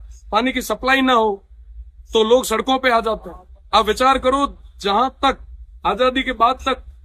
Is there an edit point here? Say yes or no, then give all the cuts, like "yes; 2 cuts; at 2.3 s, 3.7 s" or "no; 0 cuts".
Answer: no; 0 cuts